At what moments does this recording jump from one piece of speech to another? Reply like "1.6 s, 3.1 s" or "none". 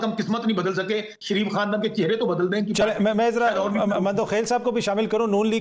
none